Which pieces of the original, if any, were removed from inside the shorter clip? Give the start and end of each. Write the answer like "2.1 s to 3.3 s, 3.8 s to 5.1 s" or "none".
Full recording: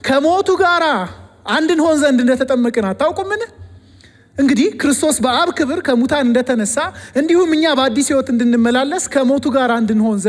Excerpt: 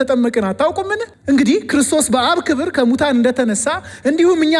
3.5 s to 4.2 s